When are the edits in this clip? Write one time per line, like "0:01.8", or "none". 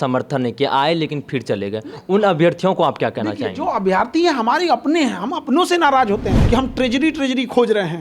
0:06.4